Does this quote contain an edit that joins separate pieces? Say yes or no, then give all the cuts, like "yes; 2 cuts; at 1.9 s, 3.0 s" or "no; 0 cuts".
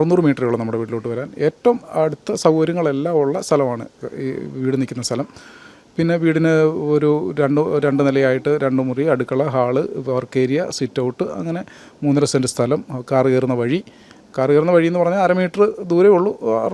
no; 0 cuts